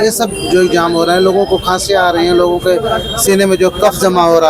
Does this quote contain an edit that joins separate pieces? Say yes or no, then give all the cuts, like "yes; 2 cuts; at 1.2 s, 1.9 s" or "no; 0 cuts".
no; 0 cuts